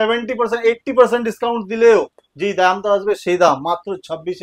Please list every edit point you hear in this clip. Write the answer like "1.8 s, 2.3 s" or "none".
none

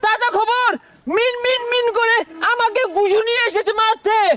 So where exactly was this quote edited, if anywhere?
none

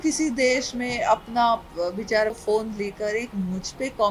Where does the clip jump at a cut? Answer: 2.4 s

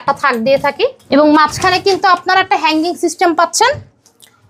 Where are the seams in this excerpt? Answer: none

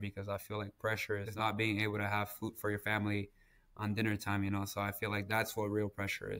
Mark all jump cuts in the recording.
1.3 s

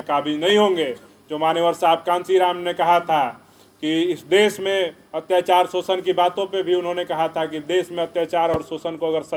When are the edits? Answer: none

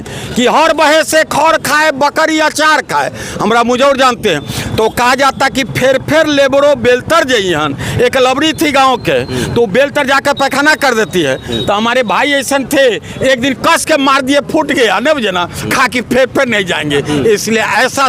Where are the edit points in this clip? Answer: none

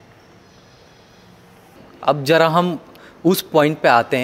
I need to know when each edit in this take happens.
1.8 s

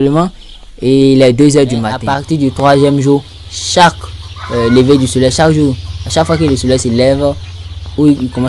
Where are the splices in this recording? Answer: 2.4 s

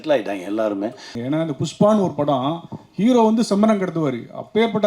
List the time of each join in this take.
1.1 s

